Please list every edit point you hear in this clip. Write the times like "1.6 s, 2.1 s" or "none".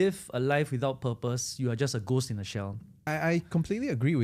none

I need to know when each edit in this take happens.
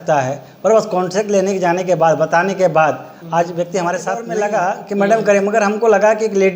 4.2 s

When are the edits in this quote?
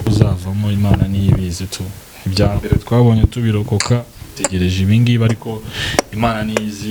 none

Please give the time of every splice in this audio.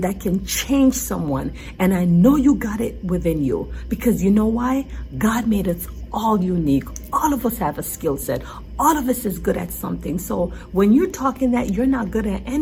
none

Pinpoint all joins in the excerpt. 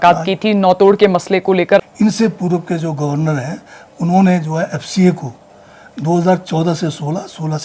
1.7 s

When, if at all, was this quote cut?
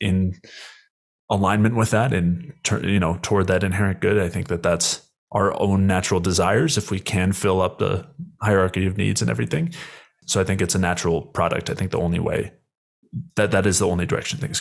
10.1 s

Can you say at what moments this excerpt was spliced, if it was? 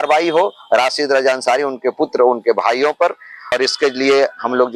3.5 s

